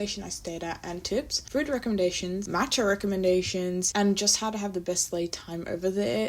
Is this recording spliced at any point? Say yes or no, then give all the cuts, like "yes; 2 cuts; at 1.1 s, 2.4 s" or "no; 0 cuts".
yes; 3 cuts; at 1.4 s, 2.4 s, 3.9 s